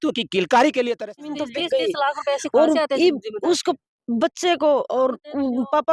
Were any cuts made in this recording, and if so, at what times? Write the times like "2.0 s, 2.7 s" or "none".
1.0 s